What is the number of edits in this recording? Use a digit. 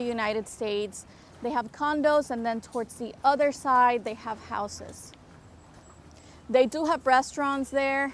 0